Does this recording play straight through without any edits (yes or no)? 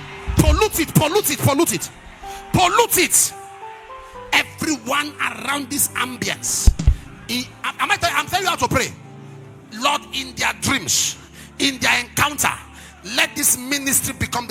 yes